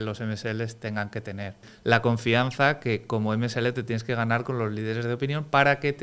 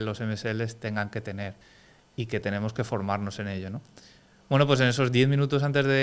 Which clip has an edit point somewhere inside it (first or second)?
first